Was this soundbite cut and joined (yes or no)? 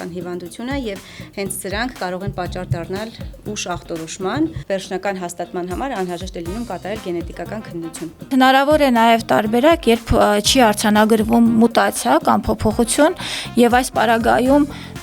yes